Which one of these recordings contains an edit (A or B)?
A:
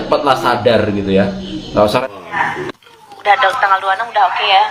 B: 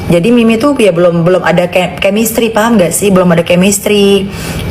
A